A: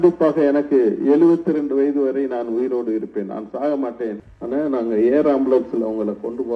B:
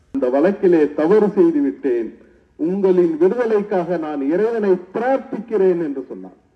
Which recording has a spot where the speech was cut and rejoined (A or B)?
A